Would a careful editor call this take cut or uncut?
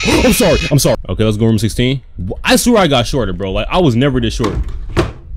cut